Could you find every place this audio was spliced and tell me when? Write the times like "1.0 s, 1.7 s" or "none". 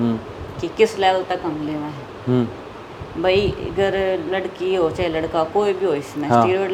none